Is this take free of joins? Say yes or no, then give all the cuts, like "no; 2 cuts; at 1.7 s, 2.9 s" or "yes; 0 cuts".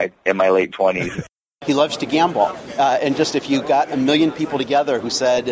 no; 1 cut; at 1.3 s